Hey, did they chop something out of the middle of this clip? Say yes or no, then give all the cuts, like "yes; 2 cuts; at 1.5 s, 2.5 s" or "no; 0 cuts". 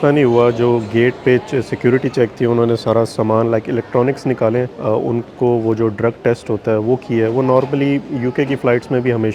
no; 0 cuts